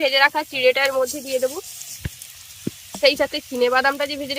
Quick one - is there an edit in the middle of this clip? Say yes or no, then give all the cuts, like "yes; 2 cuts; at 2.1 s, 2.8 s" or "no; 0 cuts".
no; 0 cuts